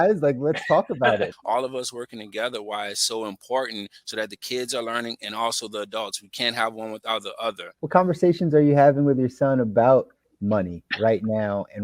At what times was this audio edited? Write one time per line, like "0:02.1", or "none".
0:01.3
0:07.7